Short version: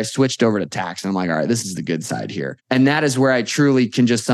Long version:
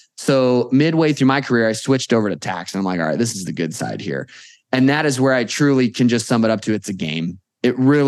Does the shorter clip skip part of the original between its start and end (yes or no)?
yes